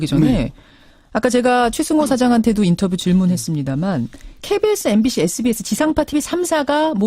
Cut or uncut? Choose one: cut